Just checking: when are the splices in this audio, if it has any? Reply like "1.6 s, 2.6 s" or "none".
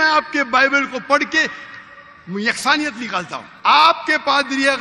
3.4 s